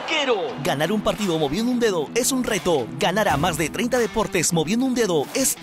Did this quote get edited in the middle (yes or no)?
no